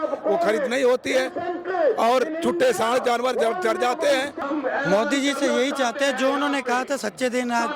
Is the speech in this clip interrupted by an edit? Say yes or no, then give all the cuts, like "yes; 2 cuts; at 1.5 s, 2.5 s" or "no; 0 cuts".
yes; 1 cut; at 4.4 s